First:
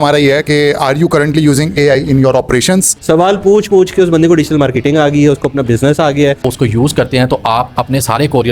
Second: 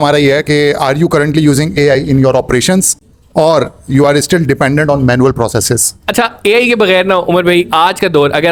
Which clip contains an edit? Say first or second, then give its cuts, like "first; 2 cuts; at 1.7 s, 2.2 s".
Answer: first; 2 cuts; at 2.9 s, 6.4 s